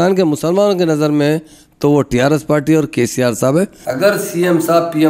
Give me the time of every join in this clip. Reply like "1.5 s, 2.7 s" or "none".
3.8 s